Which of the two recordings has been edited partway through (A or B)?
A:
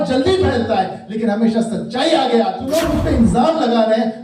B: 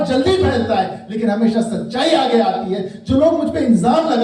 A